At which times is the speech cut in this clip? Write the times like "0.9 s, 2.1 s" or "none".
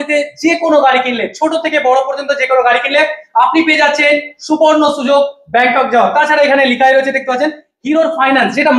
none

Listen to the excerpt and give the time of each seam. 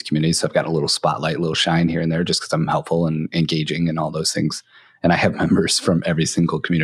none

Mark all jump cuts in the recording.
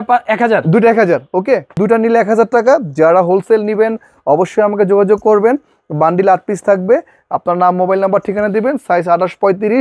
1.7 s

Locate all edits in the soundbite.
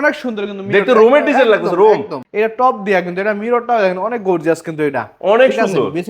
2.2 s

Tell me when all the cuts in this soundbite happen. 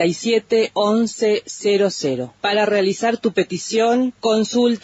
none

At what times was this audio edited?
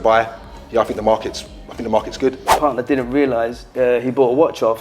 2.5 s, 3.7 s

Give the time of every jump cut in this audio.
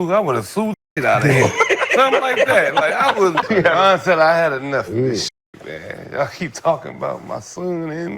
3.4 s

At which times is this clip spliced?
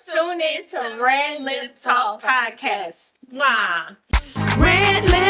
none

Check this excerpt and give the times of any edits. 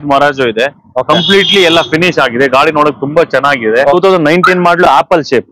4.0 s

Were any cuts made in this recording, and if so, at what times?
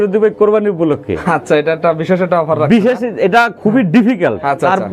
none

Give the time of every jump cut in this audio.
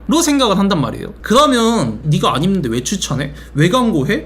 1.1 s

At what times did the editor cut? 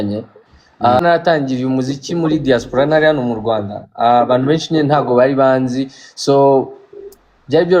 1.0 s

